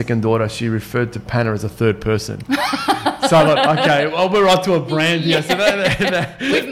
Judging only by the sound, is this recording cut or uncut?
uncut